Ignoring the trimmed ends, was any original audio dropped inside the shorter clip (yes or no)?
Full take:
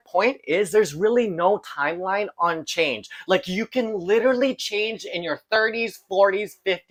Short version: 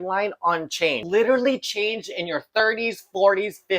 yes